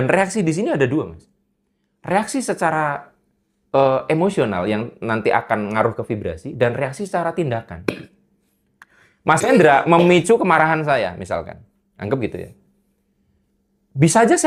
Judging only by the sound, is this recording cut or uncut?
uncut